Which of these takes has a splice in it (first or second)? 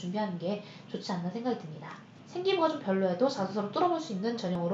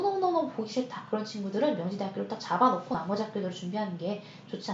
first